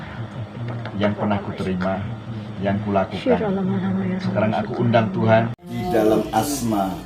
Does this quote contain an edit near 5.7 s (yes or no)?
yes